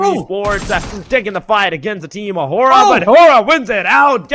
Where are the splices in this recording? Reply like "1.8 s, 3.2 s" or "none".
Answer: none